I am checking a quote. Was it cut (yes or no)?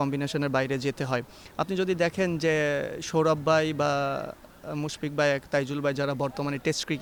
no